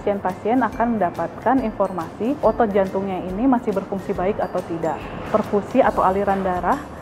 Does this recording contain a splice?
no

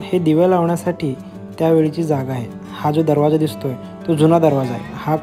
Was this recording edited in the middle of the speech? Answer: no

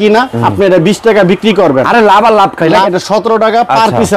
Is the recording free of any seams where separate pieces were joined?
no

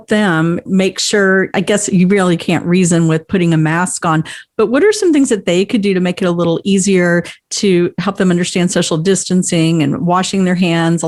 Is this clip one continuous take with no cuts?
yes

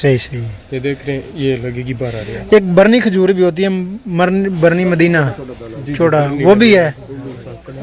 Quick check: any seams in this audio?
no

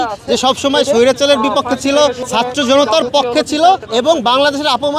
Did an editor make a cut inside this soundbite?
yes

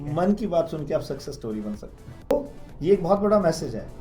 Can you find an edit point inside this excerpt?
yes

